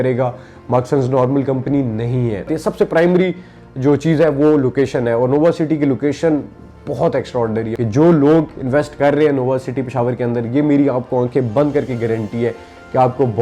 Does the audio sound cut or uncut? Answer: cut